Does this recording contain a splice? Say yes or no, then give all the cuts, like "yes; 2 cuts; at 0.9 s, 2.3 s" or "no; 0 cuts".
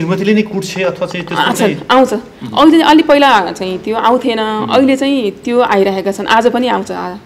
no; 0 cuts